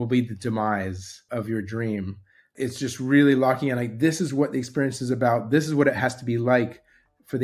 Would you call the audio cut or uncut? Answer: cut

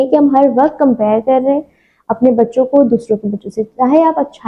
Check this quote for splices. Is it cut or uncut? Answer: uncut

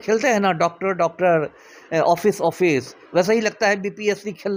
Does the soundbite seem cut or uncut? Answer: uncut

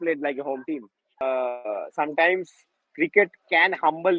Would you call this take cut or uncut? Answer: cut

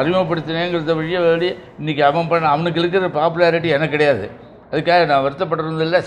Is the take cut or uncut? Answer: uncut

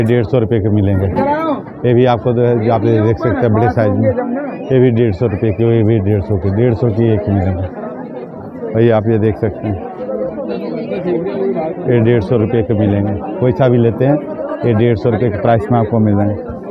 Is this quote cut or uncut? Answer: uncut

